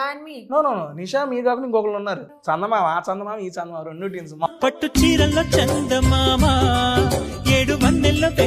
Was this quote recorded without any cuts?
no; 2 cuts; at 2.3 s, 4.5 s

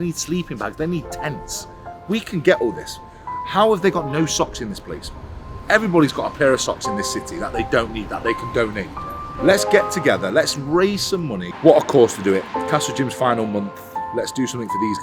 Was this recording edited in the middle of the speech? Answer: yes; 1 cut; at 11.4 s

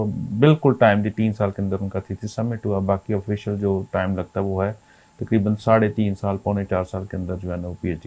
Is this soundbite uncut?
yes; 0 cuts

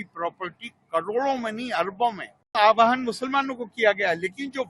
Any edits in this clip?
yes; 1 cut; at 2.6 s

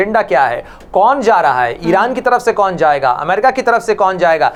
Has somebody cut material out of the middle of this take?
no; 0 cuts

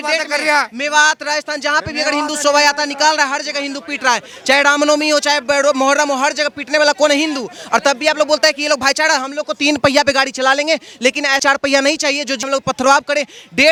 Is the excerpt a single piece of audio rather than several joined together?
yes; 0 cuts

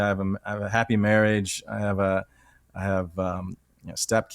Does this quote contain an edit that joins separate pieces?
no; 0 cuts

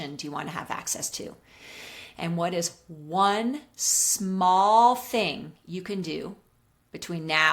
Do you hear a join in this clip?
no; 0 cuts

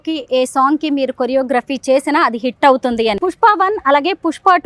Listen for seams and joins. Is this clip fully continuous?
no; 1 cut; at 3.2 s

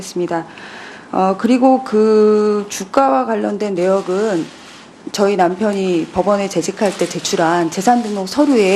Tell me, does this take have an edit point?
no; 0 cuts

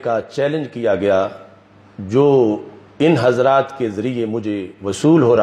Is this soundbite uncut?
yes; 0 cuts

